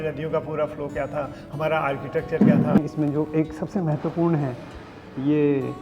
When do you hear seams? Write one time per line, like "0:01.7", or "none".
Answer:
0:02.8